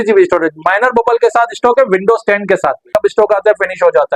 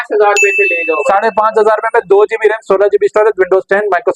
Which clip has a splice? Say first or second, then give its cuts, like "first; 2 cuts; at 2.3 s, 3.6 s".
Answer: first; 1 cut; at 3.0 s